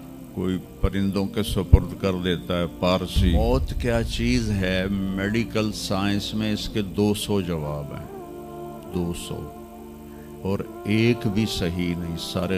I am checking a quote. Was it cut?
yes; 1 cut; at 3.3 s

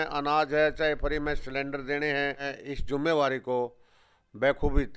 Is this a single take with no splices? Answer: no; 1 cut; at 2.5 s

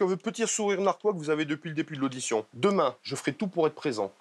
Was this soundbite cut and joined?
yes; 2 cuts; at 2.5 s, 3.1 s

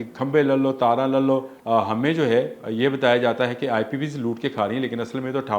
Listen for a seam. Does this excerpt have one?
yes; 1 cut; at 1.5 s

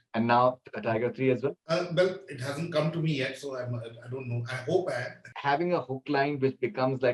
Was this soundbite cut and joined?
yes; 1 cut; at 5.2 s

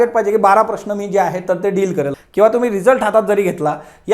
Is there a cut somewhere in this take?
yes; 1 cut; at 2.2 s

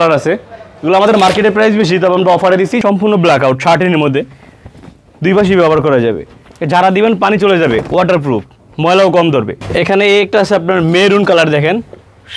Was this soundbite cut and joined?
yes; 2 cuts; at 2.8 s, 9.6 s

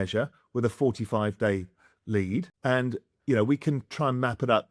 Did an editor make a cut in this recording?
yes; 1 cut; at 2.5 s

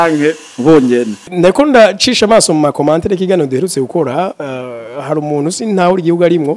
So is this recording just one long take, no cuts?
no; 1 cut; at 1.3 s

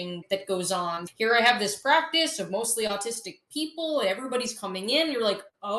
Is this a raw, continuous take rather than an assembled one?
yes; 0 cuts

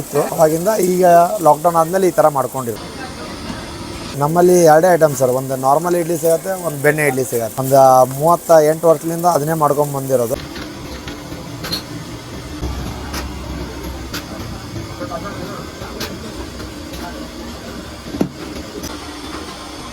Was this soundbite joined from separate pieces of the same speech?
yes; 5 cuts; at 2.8 s, 4.1 s, 10.4 s, 12.6 s, 18.9 s

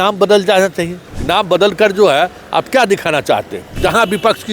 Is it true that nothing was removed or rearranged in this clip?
no; 2 cuts; at 1.0 s, 3.8 s

